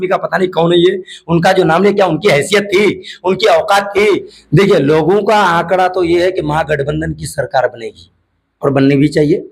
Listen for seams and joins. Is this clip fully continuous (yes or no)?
no